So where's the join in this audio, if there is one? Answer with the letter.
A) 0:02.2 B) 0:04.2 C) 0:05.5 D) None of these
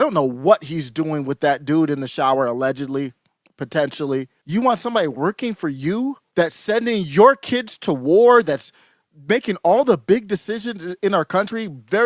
D